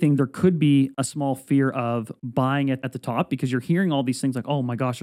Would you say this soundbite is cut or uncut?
cut